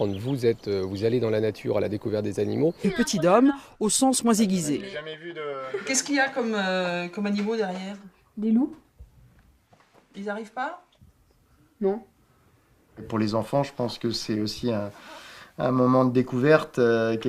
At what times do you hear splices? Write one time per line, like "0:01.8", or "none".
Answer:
none